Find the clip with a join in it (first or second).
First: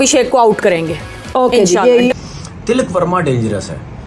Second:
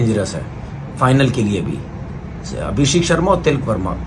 first